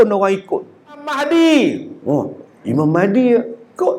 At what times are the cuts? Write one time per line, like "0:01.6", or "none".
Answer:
0:01.2